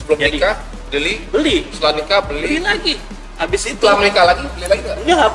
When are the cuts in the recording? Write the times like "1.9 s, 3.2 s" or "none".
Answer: none